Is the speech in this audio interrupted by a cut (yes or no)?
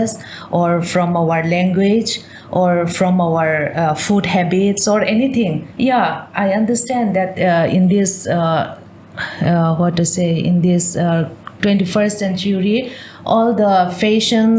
yes